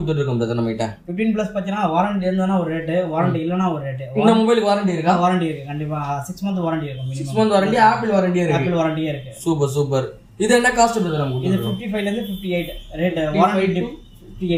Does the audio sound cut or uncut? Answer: uncut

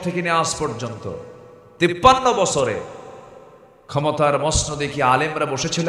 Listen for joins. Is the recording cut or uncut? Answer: uncut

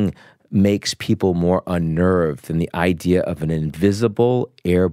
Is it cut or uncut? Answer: uncut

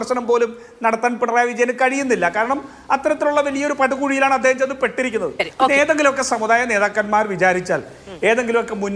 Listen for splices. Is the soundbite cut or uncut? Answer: cut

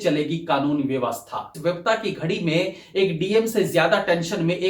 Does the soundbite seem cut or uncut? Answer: cut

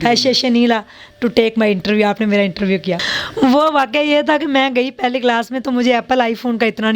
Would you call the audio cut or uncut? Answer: cut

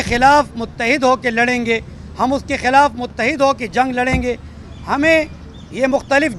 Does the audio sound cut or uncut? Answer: uncut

